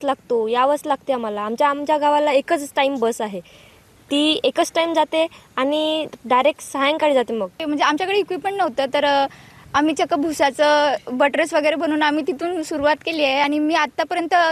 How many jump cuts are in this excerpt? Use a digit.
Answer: 2